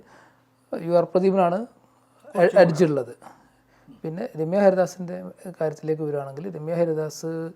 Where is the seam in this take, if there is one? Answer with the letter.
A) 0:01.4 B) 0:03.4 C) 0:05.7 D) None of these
D